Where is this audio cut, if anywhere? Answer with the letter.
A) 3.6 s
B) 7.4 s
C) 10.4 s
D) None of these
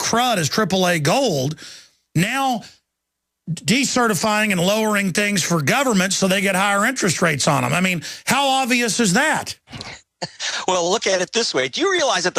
B